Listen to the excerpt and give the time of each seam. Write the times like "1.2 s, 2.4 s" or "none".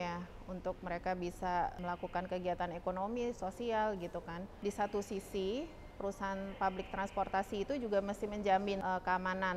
1.8 s, 4.5 s, 5.8 s, 8.8 s